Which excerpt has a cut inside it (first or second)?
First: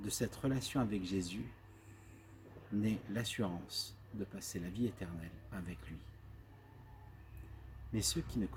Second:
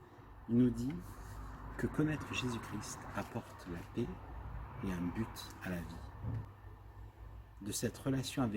second